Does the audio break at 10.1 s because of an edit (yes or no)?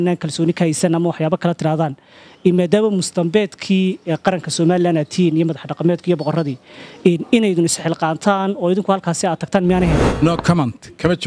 yes